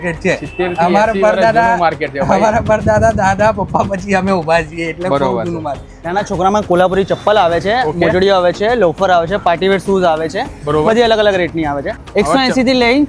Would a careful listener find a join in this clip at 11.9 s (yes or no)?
yes